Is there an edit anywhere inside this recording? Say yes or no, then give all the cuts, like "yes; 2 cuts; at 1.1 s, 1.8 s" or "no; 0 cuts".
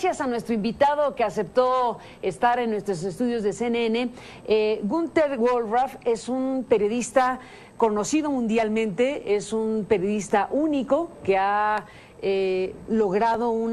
no; 0 cuts